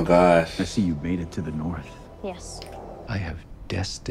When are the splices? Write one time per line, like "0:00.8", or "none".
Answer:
0:03.0